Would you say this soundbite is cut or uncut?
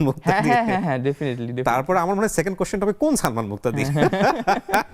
uncut